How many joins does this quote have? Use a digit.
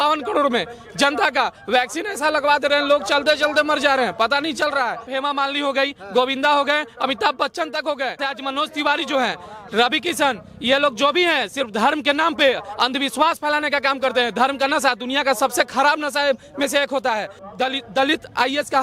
3